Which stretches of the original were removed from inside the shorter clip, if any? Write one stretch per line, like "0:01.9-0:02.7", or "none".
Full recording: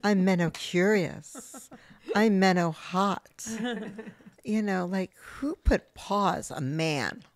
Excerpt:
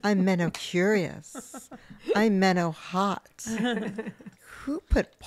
0:04.4-0:05.1